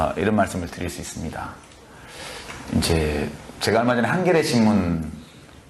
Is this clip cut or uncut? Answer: uncut